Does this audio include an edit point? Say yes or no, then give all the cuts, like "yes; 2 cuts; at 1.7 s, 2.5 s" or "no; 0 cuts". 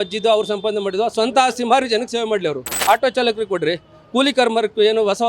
yes; 1 cut; at 2.7 s